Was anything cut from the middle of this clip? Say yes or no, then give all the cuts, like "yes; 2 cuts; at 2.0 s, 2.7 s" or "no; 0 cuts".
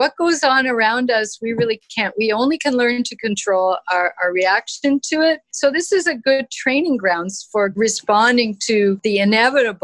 yes; 3 cuts; at 5.5 s, 7.7 s, 9.0 s